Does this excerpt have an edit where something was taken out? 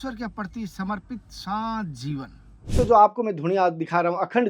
yes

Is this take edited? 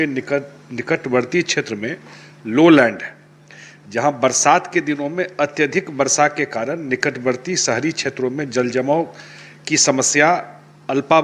no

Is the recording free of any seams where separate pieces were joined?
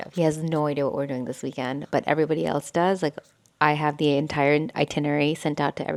yes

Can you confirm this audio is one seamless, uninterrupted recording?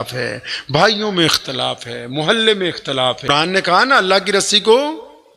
no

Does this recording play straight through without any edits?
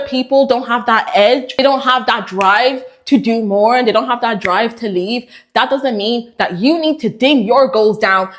yes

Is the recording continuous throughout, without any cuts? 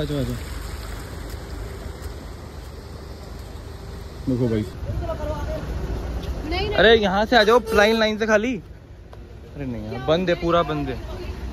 no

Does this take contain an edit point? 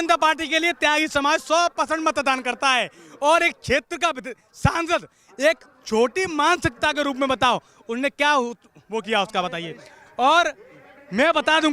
no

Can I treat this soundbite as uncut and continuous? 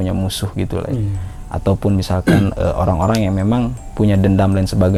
yes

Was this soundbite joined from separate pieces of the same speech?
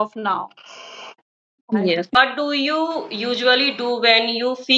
yes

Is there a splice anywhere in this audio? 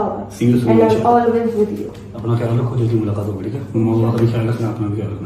no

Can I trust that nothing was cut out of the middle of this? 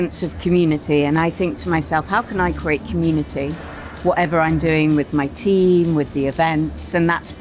yes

